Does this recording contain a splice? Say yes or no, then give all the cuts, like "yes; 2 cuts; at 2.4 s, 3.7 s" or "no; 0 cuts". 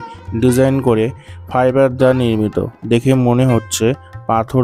no; 0 cuts